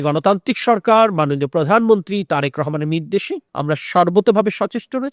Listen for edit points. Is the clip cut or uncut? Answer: uncut